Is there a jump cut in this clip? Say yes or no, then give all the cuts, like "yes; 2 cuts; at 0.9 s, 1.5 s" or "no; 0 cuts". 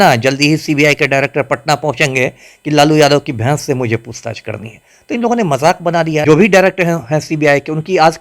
yes; 1 cut; at 6.2 s